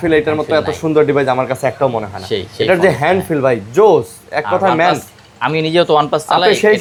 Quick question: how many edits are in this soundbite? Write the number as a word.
zero